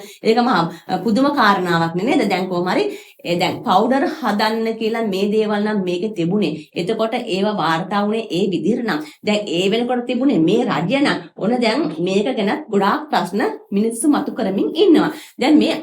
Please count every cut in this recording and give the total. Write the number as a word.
zero